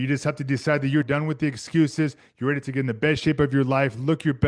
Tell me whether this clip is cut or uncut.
cut